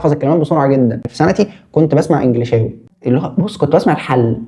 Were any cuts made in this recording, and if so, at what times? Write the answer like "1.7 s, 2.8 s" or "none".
1.1 s, 2.8 s